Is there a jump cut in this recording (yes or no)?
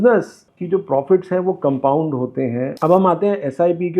yes